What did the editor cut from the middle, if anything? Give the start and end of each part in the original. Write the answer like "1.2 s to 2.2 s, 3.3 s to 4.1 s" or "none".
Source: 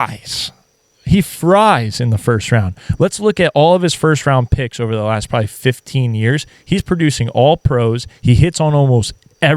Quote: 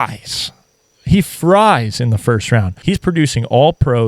2.7 s to 6.6 s